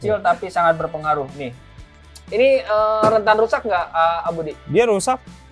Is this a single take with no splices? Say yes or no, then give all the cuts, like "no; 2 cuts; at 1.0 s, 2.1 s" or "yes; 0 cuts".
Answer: yes; 0 cuts